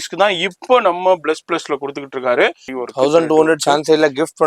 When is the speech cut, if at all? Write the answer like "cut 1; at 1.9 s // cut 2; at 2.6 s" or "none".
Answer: cut 1; at 2.7 s